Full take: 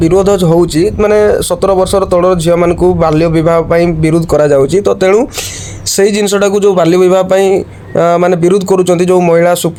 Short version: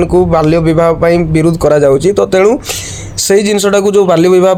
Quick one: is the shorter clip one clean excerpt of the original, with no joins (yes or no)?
yes